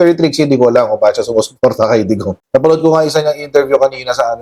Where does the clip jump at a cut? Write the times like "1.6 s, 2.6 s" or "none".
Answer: none